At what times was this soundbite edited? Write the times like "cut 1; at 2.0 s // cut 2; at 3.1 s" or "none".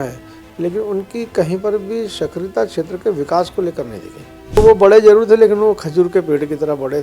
cut 1; at 4.6 s

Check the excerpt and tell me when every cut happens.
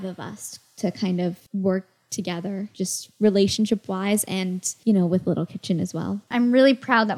cut 1; at 1.4 s // cut 2; at 2.7 s // cut 3; at 4.7 s // cut 4; at 6.3 s

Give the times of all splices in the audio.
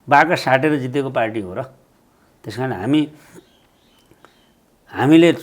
none

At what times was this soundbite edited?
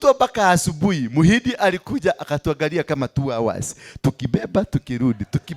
none

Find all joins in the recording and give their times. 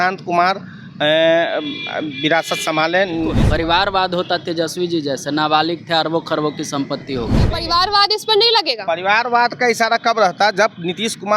cut 1; at 3.4 s // cut 2; at 7.6 s

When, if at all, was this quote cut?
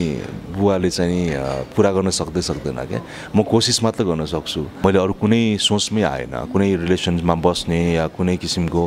cut 1; at 4.6 s

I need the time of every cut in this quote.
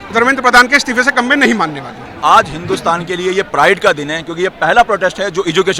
cut 1; at 2.1 s

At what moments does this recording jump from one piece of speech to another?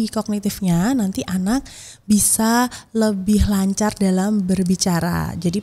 none

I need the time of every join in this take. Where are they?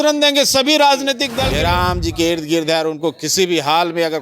cut 1; at 1.3 s

